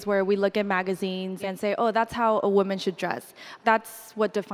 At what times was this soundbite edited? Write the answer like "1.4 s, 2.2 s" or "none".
1.4 s, 3.5 s